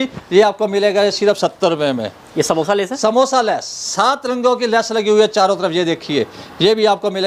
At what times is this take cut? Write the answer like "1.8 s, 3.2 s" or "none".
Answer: none